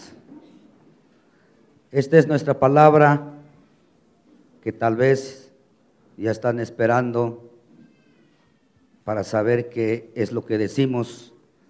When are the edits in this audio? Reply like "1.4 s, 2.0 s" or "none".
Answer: none